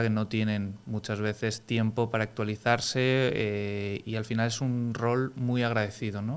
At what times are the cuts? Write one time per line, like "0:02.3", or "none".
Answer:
none